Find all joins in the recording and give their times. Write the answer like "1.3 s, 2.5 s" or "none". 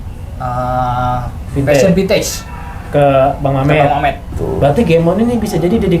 4.3 s